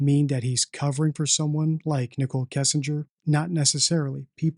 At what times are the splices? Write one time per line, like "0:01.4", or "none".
0:03.1

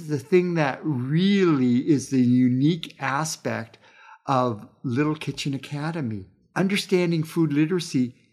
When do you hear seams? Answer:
none

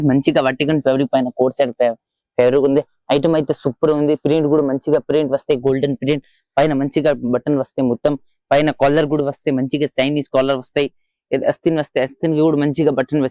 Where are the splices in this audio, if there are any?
none

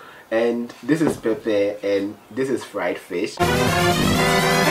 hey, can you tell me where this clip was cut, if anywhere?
0:03.4

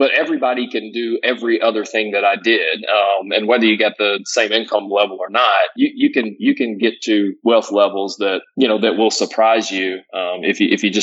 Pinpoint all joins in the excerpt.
none

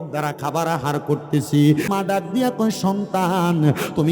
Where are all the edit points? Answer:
0:01.9

